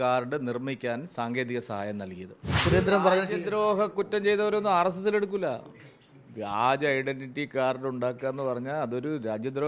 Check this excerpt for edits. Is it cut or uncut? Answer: cut